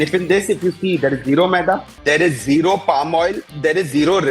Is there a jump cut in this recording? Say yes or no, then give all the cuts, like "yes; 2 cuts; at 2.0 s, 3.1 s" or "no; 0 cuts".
yes; 2 cuts; at 1.9 s, 3.5 s